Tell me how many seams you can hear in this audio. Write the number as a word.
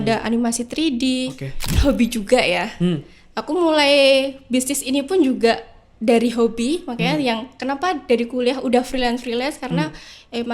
one